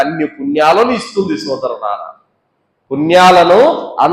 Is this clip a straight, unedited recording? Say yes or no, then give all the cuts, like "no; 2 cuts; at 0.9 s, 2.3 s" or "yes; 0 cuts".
yes; 0 cuts